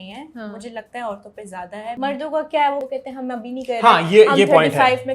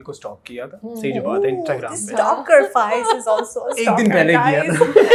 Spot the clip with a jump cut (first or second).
first